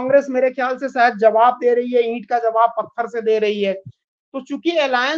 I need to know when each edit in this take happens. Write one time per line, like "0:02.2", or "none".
none